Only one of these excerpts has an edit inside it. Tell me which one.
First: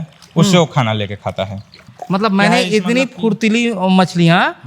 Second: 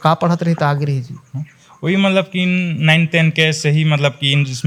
first; 1 cut; at 1.9 s

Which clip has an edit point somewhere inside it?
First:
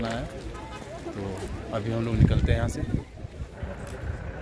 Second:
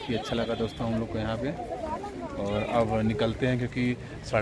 first; 1 cut; at 3.5 s

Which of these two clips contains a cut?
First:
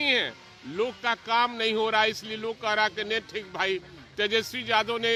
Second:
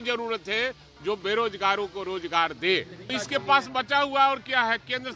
second; 1 cut; at 3.1 s

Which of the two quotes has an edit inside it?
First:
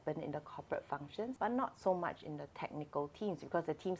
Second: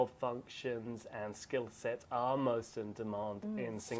first; 1 cut; at 1.4 s

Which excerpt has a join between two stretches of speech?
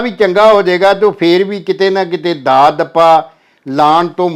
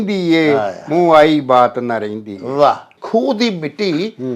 second; 1 cut; at 2.9 s

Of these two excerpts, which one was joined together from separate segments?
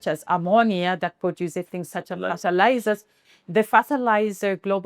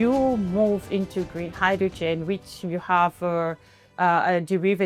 first; 1 cut; at 3.1 s

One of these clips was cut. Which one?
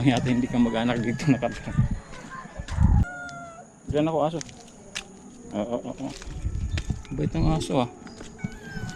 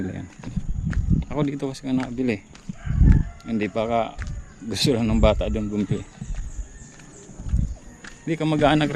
first; 1 cut; at 3.1 s

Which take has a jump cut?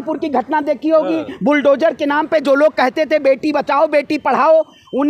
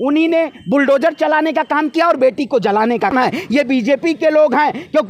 second; 1 cut; at 3.1 s

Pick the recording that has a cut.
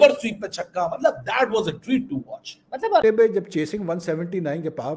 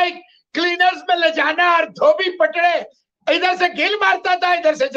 first; 1 cut; at 3.0 s

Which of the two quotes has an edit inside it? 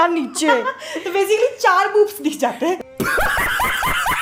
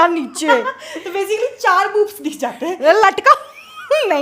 second; 1 cut; at 2.8 s

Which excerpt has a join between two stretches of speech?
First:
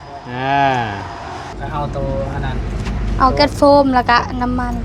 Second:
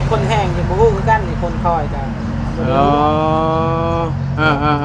first; 1 cut; at 1.5 s

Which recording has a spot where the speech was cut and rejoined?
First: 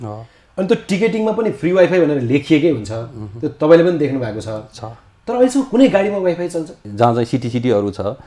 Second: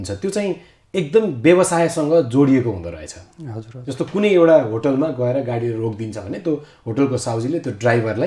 first; 1 cut; at 6.8 s

